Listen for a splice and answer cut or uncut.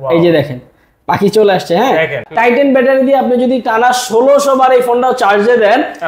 cut